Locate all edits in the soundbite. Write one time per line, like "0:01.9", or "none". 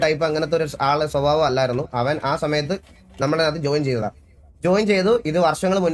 none